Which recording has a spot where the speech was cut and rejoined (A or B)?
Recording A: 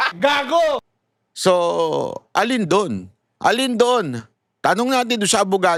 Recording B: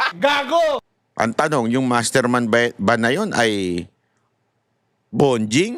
B